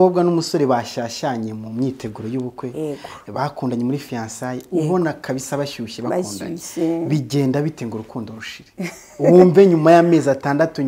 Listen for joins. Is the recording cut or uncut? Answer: uncut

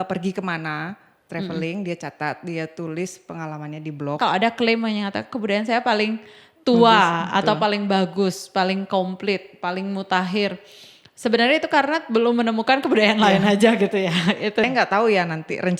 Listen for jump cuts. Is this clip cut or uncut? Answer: cut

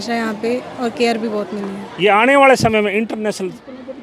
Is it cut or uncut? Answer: cut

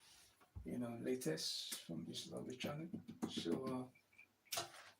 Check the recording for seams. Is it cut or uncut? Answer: cut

